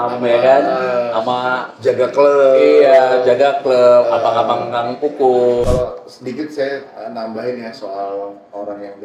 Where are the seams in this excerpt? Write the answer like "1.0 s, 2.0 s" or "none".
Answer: 5.6 s